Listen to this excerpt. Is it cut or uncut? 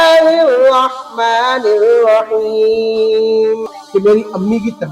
cut